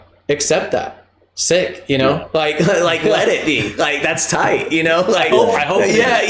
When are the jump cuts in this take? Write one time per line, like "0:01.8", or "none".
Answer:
none